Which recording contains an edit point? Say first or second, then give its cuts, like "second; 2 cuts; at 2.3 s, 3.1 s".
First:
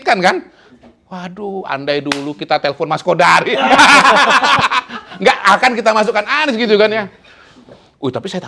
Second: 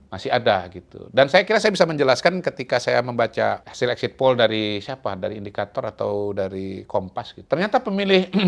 second; 2 cuts; at 3.7 s, 7.3 s